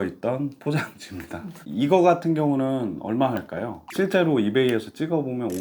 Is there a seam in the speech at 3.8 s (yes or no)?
yes